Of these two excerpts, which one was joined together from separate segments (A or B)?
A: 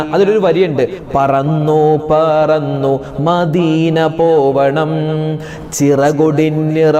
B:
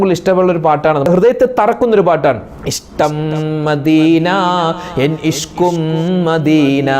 B